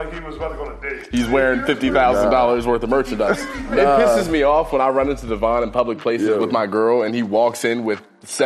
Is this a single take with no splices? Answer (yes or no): no